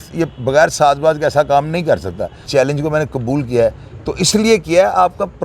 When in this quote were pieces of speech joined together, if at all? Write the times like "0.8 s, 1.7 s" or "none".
2.5 s